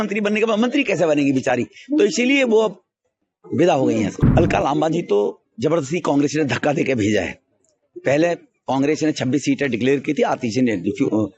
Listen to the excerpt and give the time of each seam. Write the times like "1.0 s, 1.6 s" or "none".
4.1 s